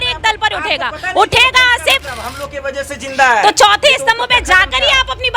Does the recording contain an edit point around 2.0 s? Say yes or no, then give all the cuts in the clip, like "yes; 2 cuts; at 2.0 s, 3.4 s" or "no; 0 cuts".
yes; 1 cut; at 2.0 s